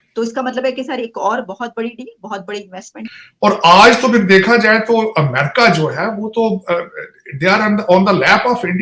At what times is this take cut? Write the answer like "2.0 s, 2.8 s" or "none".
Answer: 3.0 s